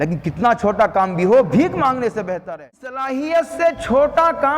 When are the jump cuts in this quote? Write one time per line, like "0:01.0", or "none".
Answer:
0:03.0